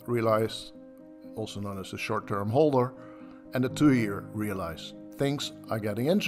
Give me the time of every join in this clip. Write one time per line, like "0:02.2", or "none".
none